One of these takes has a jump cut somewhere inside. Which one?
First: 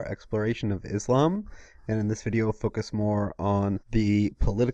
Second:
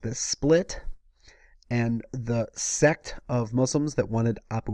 first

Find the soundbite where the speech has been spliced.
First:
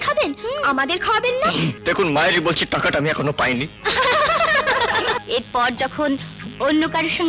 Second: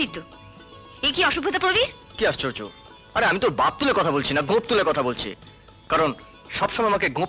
first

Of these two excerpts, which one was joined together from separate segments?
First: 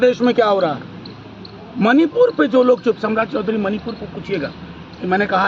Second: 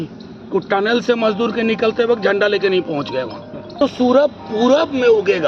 second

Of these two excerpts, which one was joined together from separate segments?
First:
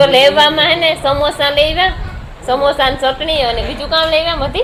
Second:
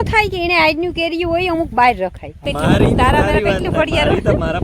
second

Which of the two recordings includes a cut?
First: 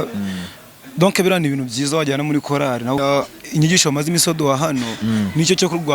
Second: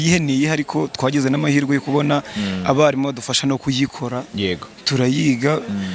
first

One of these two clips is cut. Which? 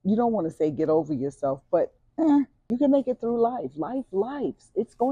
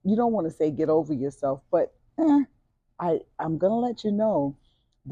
first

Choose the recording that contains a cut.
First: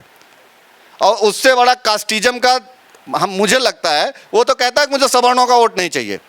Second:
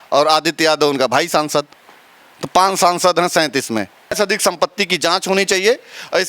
second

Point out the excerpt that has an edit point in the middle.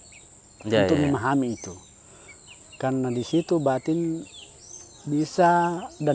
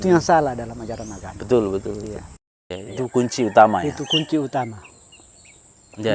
second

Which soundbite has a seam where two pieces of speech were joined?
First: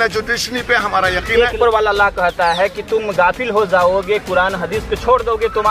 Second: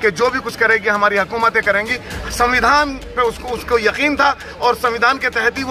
first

